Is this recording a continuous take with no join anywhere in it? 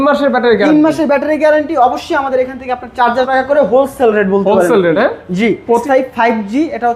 no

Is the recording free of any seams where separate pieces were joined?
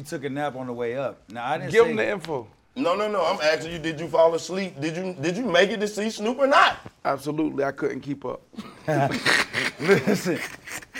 yes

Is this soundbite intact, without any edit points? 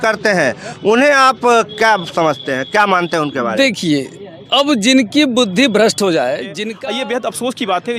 no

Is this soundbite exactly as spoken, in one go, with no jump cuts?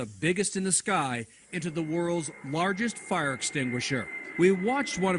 no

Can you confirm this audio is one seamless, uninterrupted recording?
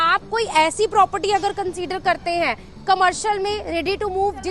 yes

